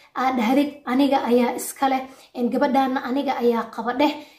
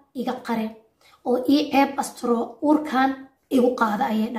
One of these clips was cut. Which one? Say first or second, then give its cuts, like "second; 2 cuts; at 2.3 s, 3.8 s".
second; 1 cut; at 3.3 s